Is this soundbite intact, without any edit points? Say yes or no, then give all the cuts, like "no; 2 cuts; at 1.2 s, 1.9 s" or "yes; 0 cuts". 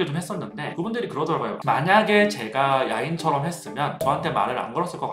no; 1 cut; at 1.6 s